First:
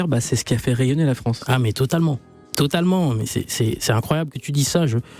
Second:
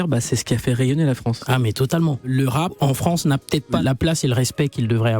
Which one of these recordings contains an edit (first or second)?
second